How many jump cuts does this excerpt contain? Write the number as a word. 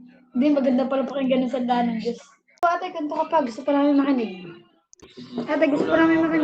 one